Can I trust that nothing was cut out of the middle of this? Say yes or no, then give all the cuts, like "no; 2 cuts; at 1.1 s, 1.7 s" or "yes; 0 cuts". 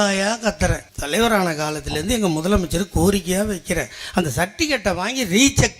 no; 1 cut; at 0.9 s